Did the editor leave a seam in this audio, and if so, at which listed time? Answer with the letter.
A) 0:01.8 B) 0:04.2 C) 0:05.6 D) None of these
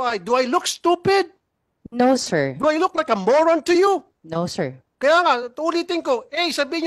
D